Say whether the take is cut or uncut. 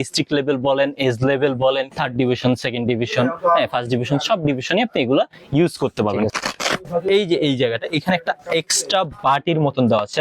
cut